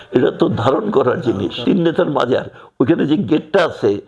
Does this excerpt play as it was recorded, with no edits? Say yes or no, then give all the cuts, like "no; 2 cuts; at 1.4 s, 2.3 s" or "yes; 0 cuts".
no; 1 cut; at 1.6 s